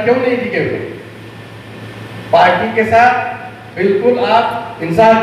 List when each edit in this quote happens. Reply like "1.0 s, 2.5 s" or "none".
none